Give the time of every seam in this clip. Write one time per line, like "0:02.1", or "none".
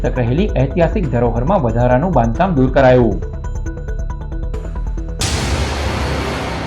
0:05.2